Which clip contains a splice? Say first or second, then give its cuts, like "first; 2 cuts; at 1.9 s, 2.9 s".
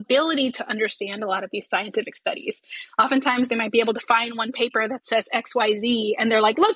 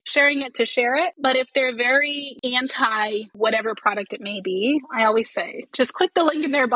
second; 3 cuts; at 1.1 s, 2.3 s, 3.3 s